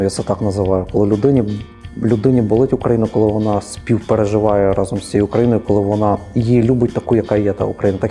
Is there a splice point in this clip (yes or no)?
no